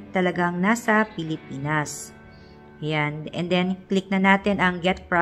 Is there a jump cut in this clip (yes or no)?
no